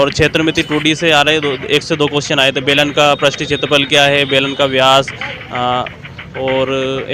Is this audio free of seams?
yes; 0 cuts

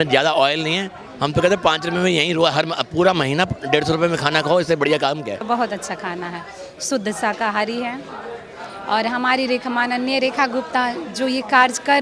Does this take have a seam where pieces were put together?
yes; 1 cut; at 5.4 s

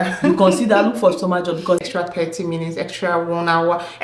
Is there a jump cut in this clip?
yes; 1 cut; at 1.8 s

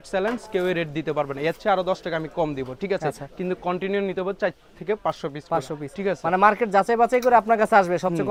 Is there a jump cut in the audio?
no; 0 cuts

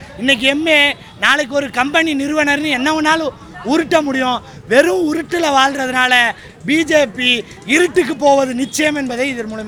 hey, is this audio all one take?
yes; 0 cuts

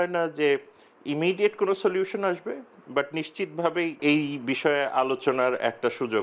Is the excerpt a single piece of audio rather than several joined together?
yes; 0 cuts

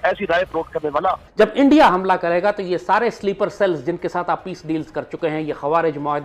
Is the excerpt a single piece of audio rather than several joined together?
no; 1 cut; at 1.2 s

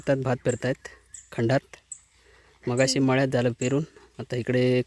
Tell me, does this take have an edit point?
no; 0 cuts

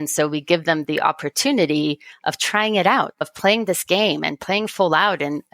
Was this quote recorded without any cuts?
no; 1 cut; at 3.3 s

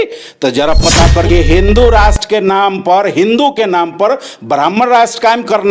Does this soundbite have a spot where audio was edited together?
yes; 1 cut; at 1.3 s

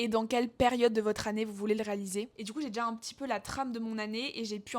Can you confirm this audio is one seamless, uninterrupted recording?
no; 1 cut; at 2.3 s

